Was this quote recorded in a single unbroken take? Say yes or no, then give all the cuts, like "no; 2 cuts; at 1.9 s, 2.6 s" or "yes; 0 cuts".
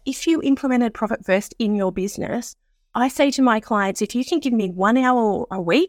yes; 0 cuts